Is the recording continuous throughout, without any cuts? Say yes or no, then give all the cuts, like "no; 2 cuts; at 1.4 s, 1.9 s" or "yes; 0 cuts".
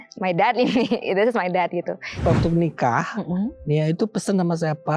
no; 1 cut; at 2.2 s